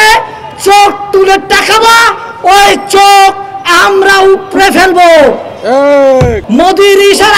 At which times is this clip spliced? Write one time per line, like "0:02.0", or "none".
0:06.4